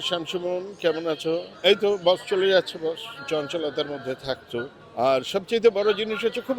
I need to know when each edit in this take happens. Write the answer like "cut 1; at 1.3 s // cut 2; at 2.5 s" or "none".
cut 1; at 1.5 s // cut 2; at 3.1 s // cut 3; at 4.8 s